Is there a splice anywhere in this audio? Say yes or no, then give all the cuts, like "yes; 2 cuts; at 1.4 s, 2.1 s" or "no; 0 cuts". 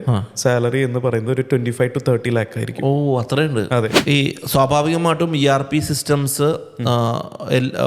yes; 1 cut; at 4.0 s